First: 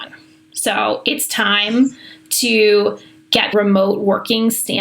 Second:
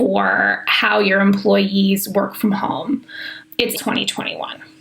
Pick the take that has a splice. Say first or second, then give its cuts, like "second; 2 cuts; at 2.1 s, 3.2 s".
first; 1 cut; at 3.5 s